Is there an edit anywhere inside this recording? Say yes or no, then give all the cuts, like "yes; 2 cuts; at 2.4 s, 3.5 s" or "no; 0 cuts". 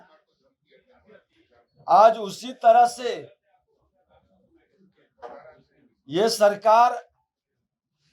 no; 0 cuts